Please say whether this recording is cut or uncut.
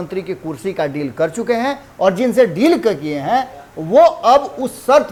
uncut